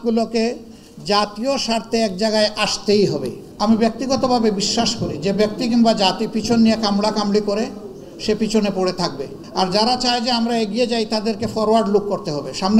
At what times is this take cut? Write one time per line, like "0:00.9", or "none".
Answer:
0:03.4
0:09.3